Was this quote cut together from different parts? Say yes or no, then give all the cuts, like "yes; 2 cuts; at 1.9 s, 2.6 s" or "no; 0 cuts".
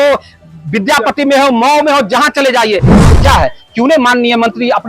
yes; 1 cut; at 2.9 s